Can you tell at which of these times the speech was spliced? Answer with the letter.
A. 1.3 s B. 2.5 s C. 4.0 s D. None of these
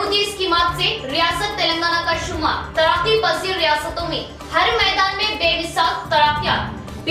D